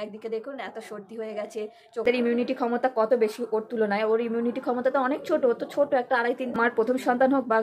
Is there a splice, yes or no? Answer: yes